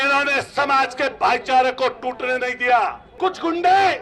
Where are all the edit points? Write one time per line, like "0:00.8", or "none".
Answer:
0:03.1